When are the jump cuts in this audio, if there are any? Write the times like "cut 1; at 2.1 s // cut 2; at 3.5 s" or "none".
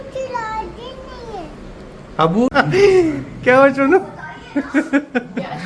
cut 1; at 2.5 s